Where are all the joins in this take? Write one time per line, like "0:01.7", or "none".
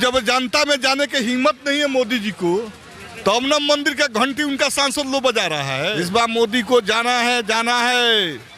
0:05.9